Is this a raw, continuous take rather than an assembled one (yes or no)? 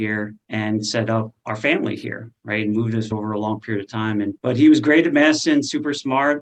yes